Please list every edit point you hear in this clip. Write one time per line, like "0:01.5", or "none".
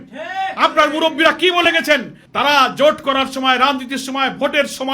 none